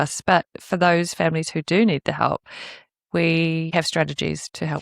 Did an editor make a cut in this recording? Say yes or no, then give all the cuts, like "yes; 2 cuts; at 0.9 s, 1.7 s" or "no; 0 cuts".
yes; 1 cut; at 3.7 s